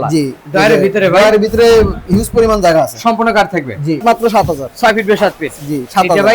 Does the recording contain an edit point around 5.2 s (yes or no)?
no